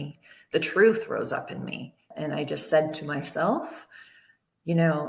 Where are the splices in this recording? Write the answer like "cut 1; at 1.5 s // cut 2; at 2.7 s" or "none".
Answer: cut 1; at 2.1 s